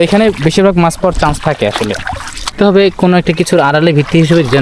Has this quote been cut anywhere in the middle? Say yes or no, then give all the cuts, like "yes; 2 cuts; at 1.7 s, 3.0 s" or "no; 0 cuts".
yes; 1 cut; at 2.5 s